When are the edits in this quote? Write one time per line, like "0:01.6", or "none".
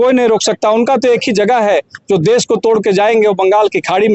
none